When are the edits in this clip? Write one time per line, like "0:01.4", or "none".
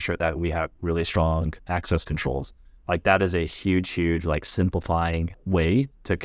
0:05.3